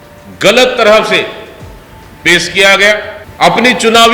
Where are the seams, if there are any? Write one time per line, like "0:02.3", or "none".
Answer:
0:03.2